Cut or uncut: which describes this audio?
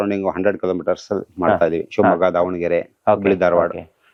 uncut